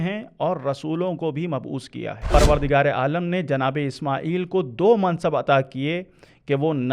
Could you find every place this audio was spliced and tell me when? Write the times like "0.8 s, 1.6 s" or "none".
2.3 s